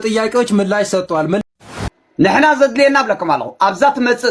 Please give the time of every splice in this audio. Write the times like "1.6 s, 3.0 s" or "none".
1.4 s